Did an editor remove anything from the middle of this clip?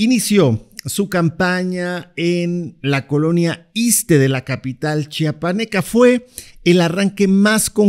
no; 0 cuts

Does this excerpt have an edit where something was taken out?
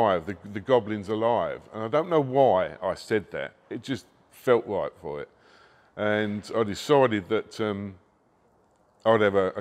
no; 0 cuts

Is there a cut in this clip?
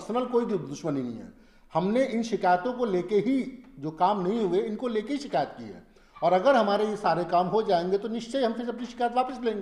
no; 0 cuts

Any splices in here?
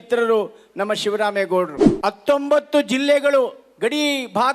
yes; 1 cut; at 1.8 s

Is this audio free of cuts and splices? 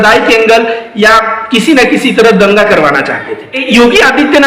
no; 1 cut; at 3.5 s

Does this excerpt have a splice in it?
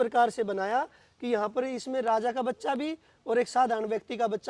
no; 0 cuts

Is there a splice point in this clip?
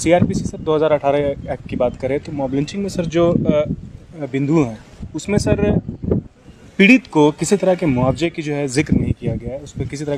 no; 0 cuts

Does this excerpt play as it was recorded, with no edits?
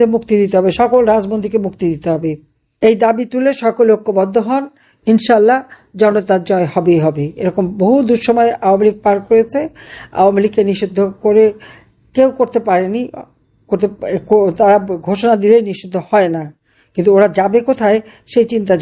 yes; 0 cuts

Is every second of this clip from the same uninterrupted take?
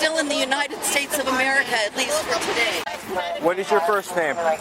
no; 1 cut; at 2.9 s

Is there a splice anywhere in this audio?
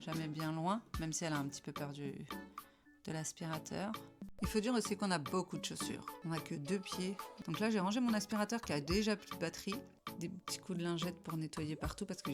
yes; 4 cuts; at 4.3 s, 6.1 s, 7.3 s, 10.0 s

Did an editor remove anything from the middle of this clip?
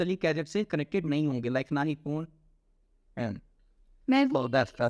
no; 0 cuts

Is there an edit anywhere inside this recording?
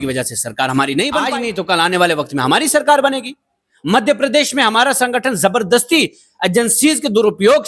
yes; 1 cut; at 1.2 s

